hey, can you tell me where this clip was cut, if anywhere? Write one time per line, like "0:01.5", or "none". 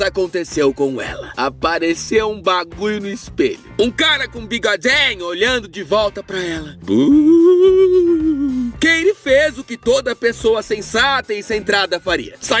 0:11.5